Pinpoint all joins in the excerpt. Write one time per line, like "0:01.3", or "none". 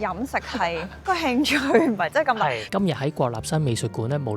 0:00.9
0:02.7